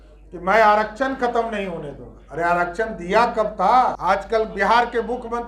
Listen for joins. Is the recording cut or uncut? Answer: cut